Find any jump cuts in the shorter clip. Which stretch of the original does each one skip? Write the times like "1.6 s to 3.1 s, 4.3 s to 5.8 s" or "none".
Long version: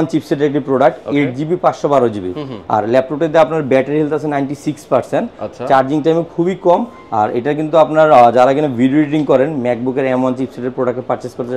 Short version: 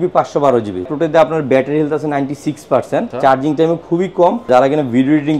2.4 s to 3.1 s, 5.3 s to 5.6 s, 6.9 s to 8.3 s

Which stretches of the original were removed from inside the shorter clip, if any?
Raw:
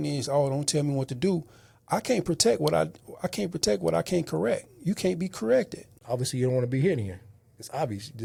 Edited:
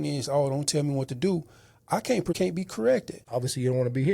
2.4 s to 5.0 s, 5.8 s to 5.9 s

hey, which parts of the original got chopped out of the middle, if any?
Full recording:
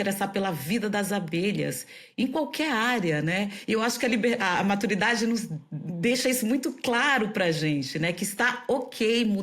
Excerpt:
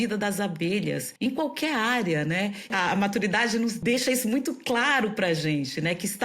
1.8 s to 2.0 s, 3.7 s to 4.4 s, 5.5 s to 6.0 s

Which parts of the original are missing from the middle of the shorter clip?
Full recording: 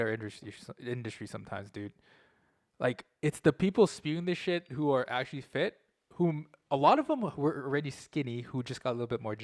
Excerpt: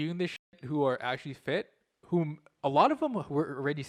none

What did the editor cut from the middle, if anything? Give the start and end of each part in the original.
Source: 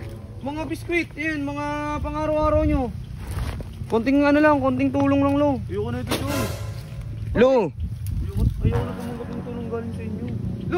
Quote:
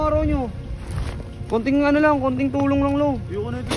none

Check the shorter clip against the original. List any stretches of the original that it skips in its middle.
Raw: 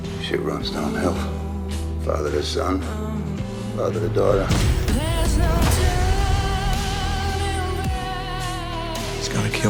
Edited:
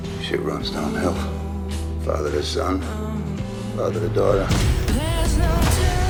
none

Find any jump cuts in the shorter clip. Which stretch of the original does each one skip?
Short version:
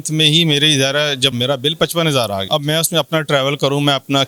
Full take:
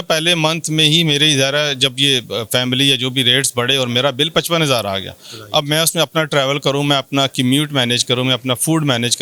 1.9 s to 3.9 s, 5.0 s to 5.5 s

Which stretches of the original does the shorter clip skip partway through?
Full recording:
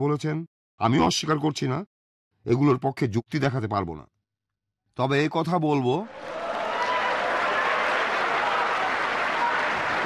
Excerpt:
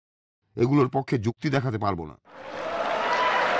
4.4 s to 6.2 s

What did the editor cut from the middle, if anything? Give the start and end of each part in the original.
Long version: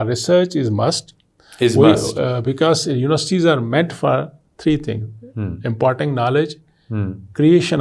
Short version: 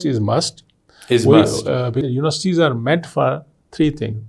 2.5 s to 2.9 s

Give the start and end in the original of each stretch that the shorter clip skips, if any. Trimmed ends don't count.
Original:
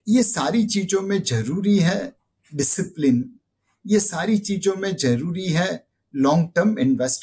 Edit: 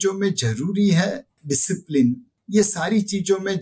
2.2 s to 2.4 s, 3.4 s to 3.7 s

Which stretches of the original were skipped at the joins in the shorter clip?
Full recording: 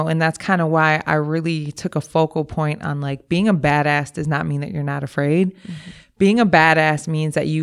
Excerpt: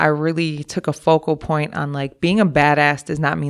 none

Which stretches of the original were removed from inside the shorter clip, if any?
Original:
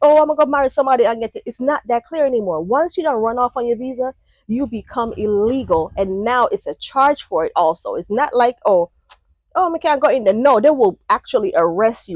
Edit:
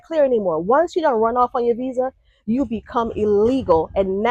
none

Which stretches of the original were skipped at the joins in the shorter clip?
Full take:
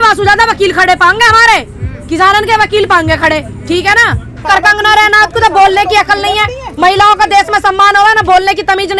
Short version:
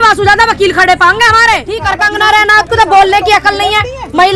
1.8 s to 4.4 s

